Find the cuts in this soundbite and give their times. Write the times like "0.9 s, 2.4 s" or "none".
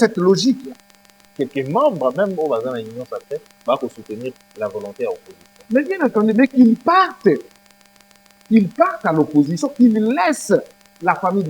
1.2 s